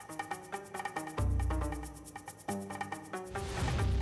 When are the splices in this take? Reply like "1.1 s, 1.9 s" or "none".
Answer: 3.0 s